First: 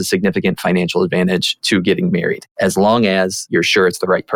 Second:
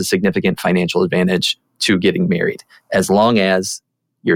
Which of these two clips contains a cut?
first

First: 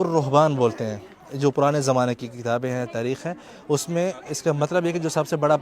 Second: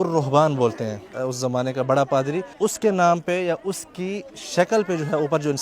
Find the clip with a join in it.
second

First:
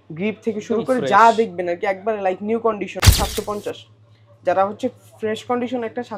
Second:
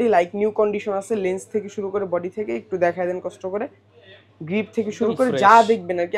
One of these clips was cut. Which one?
first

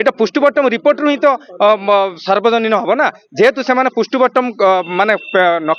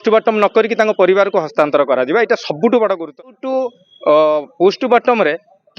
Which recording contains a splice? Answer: second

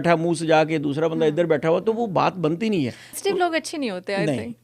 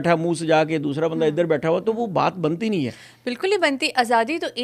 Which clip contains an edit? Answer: first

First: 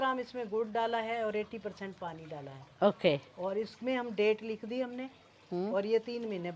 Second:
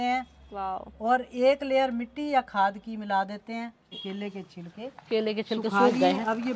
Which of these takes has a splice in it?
second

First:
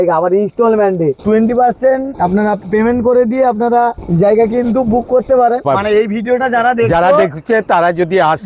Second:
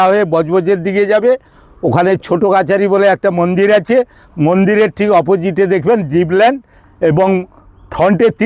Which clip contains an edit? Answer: first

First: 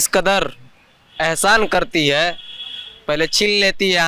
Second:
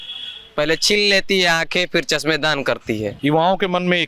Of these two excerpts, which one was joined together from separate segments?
second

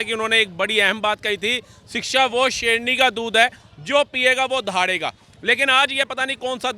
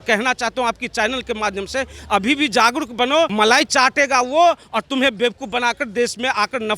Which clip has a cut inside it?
second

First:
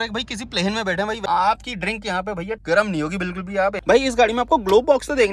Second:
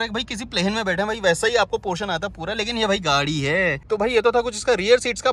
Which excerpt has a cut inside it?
first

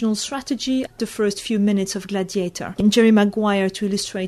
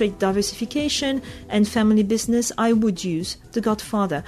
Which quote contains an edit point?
first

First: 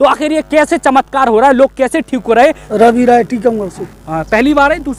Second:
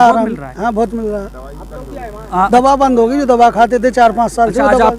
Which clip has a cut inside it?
first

